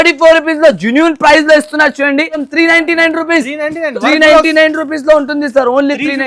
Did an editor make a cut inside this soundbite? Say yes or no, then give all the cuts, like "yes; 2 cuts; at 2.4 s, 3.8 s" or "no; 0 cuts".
yes; 1 cut; at 2.5 s